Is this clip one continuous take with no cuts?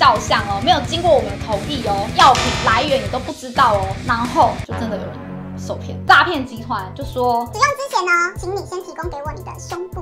no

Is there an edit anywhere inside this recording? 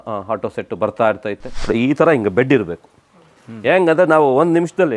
yes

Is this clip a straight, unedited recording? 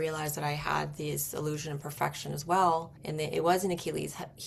no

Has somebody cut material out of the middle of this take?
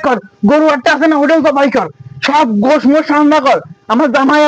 no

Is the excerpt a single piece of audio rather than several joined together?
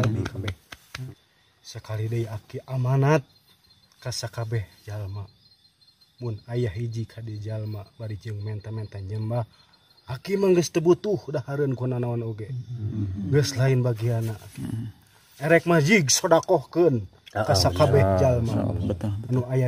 no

